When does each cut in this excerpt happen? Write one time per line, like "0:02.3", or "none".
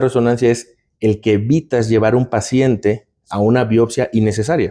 none